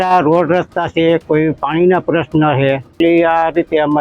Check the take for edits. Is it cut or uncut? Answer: cut